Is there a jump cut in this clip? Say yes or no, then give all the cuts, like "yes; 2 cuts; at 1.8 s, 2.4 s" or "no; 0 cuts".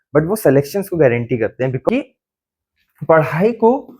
yes; 1 cut; at 1.9 s